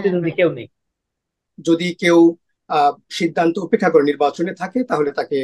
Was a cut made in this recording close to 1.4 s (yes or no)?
yes